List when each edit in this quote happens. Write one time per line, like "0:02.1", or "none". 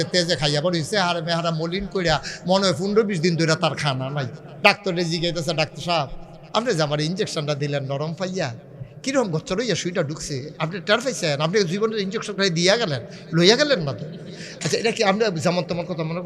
0:04.4